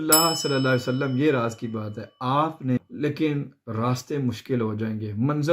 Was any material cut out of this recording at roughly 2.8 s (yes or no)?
yes